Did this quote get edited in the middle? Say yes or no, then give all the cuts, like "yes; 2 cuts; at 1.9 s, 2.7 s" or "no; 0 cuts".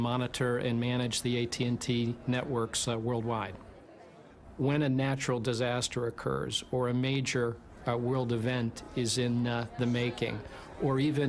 yes; 1 cut; at 1.9 s